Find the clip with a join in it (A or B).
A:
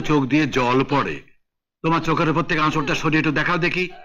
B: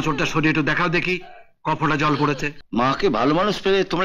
B